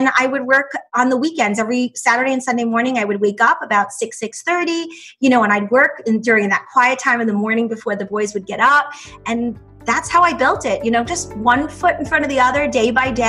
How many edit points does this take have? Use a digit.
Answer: 1